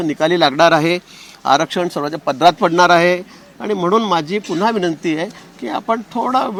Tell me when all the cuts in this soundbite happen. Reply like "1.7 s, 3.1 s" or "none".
none